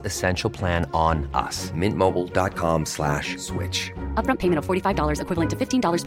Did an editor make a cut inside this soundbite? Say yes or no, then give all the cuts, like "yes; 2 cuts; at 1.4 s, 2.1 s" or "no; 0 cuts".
no; 0 cuts